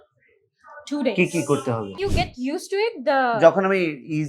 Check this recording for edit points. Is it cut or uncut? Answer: cut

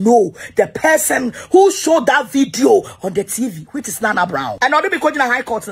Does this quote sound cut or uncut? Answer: cut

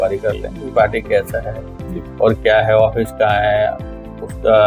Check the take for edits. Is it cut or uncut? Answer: uncut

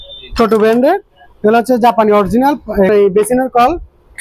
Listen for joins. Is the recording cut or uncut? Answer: cut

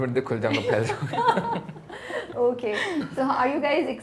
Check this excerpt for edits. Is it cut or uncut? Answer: uncut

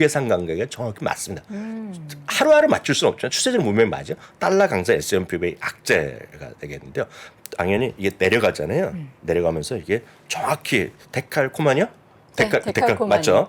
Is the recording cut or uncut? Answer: uncut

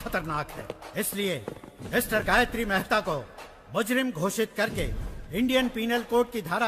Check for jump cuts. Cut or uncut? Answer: uncut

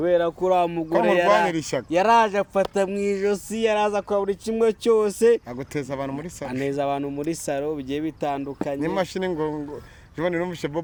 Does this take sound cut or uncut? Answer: uncut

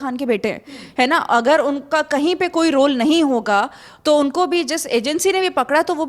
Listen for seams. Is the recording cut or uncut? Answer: uncut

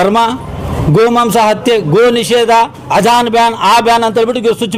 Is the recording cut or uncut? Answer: uncut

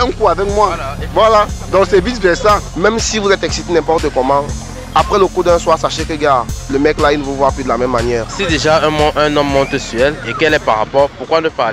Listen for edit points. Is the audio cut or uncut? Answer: cut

